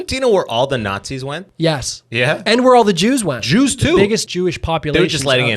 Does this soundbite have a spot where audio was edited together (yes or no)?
yes